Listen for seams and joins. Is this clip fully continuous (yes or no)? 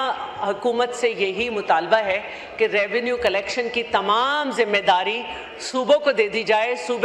yes